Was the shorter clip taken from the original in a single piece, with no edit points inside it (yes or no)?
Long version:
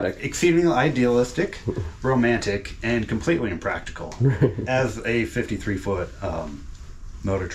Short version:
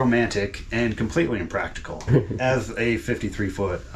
no